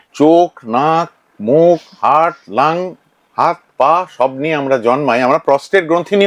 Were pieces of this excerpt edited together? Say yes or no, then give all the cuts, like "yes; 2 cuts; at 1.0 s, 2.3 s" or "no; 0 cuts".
no; 0 cuts